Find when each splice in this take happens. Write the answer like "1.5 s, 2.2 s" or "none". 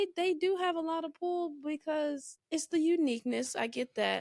2.3 s